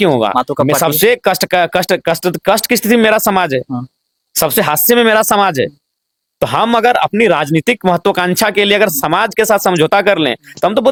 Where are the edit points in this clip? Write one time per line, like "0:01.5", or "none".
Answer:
none